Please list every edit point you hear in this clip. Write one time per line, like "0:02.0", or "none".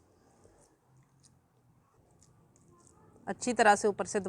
0:02.0